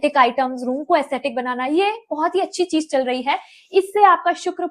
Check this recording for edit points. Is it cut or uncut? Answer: uncut